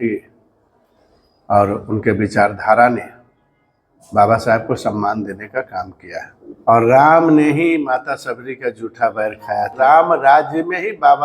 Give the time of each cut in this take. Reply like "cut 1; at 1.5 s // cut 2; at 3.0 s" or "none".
cut 1; at 6.9 s // cut 2; at 9.7 s